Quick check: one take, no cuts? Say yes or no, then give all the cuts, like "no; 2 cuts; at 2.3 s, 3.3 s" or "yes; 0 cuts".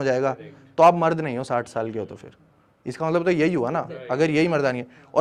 yes; 0 cuts